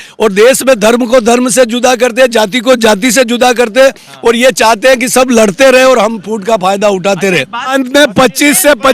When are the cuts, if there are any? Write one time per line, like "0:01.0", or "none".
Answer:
0:07.7